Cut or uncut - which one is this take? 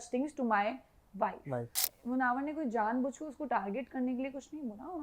cut